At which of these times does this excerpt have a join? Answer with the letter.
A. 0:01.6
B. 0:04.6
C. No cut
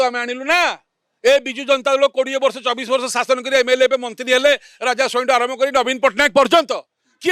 C